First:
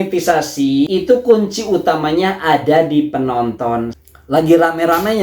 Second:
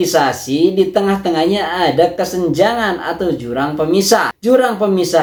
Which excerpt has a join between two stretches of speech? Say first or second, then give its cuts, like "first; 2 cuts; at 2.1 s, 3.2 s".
first; 2 cuts; at 0.9 s, 4.0 s